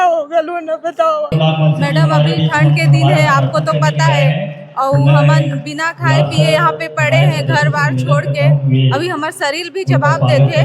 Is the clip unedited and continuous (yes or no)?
no